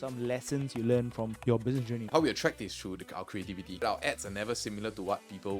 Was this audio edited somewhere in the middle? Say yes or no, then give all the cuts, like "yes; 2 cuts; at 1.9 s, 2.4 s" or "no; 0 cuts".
yes; 2 cuts; at 1.6 s, 3.8 s